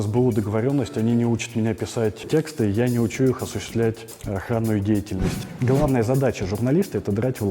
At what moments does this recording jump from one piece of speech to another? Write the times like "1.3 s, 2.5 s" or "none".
2.2 s, 4.1 s, 5.4 s